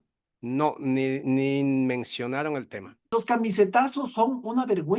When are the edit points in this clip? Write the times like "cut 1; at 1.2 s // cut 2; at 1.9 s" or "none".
cut 1; at 3.0 s